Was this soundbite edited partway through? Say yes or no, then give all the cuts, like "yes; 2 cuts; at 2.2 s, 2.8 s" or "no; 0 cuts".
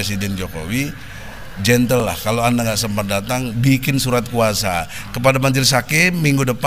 yes; 1 cut; at 5.0 s